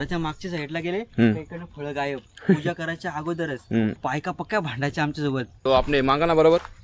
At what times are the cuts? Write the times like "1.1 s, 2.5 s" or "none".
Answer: 3.9 s, 5.5 s